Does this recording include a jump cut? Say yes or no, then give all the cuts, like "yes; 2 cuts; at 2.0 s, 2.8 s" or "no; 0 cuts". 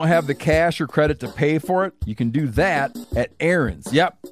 yes; 2 cuts; at 2.0 s, 3.0 s